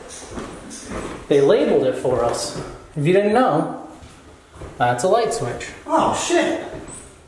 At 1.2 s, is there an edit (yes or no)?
no